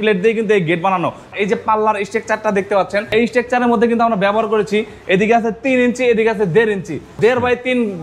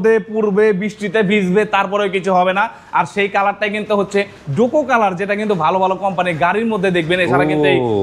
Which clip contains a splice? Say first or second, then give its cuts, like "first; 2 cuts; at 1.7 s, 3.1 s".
first; 3 cuts; at 1.3 s, 3.1 s, 7.1 s